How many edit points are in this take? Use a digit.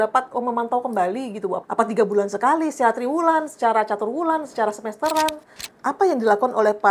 2